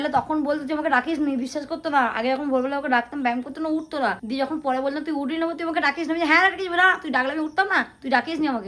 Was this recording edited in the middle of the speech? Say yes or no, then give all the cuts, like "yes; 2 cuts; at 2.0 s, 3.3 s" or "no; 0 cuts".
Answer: no; 0 cuts